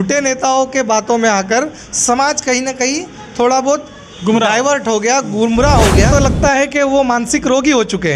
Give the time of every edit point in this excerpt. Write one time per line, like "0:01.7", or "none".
0:06.1